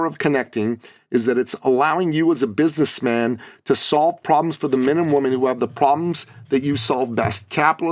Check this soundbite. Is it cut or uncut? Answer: uncut